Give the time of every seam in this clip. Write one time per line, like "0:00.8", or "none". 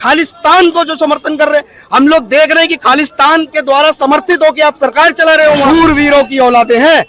0:05.6